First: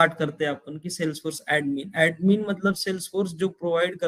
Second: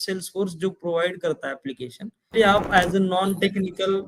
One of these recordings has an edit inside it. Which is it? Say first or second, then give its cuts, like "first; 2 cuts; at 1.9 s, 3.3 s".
second; 1 cut; at 2.3 s